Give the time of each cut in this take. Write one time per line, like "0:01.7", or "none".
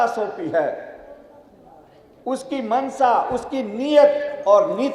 none